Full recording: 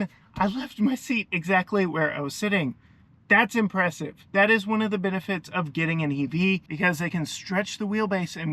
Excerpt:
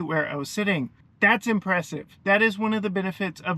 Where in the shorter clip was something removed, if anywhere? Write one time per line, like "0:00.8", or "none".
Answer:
0:01.0